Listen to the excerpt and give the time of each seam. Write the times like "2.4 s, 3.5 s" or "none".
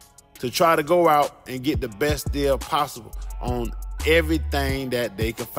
none